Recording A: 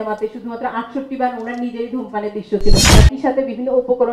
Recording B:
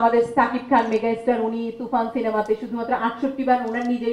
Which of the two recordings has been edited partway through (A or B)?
A